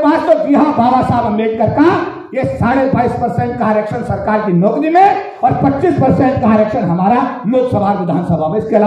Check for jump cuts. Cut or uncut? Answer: uncut